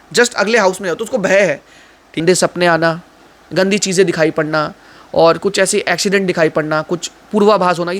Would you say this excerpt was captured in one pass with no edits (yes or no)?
no